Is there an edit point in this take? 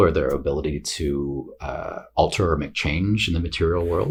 no; 0 cuts

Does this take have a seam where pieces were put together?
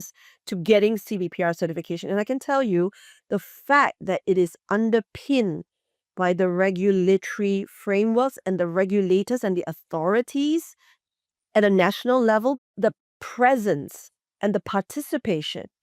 yes; 1 cut; at 12.7 s

